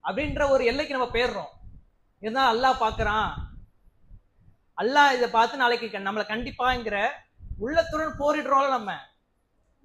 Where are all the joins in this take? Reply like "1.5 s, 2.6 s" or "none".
none

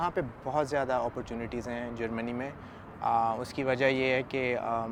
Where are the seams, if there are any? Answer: none

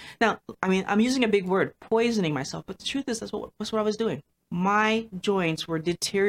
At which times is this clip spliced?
4.3 s

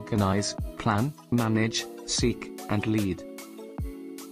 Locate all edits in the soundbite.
3.2 s

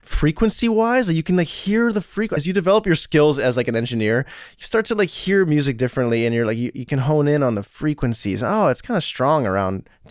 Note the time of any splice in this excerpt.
2.3 s

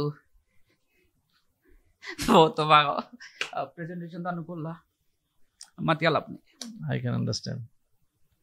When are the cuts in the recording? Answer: none

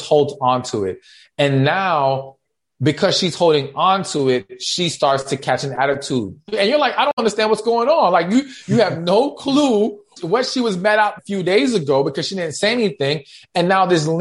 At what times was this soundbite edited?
6.5 s, 10.1 s, 11.2 s

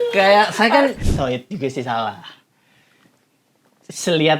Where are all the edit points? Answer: 1.1 s

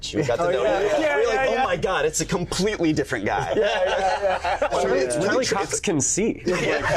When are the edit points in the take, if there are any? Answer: 4.8 s

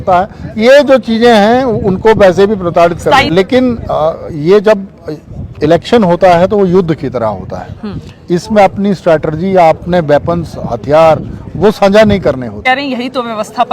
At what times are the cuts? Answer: 3.3 s, 12.6 s

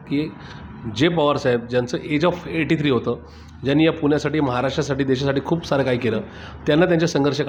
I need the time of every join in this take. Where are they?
none

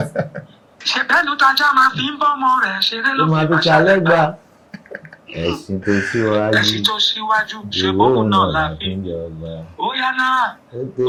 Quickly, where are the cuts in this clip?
none

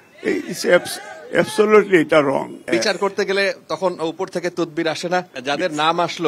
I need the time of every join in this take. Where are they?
2.7 s, 5.3 s

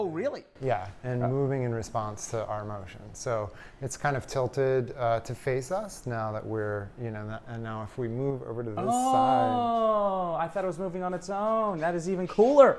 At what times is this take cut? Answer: none

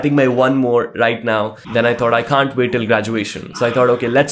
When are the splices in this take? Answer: 1.6 s, 3.4 s

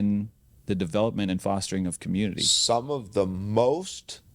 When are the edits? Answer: 2.5 s

